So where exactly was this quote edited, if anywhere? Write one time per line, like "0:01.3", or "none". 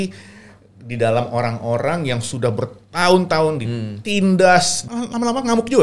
0:04.8